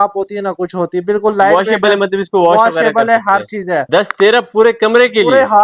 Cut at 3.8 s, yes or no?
yes